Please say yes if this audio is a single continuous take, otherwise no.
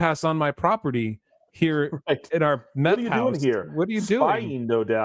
yes